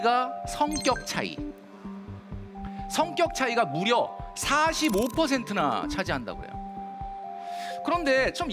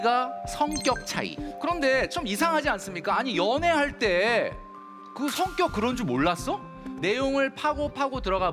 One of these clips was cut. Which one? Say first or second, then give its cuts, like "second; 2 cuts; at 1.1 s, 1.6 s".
second; 2 cuts; at 1.5 s, 6.8 s